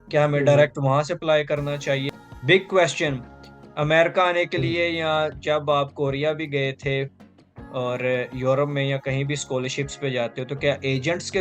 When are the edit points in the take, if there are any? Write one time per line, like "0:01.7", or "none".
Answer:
0:02.1